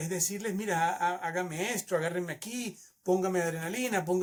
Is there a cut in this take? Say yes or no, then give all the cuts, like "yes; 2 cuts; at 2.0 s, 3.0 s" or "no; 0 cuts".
no; 0 cuts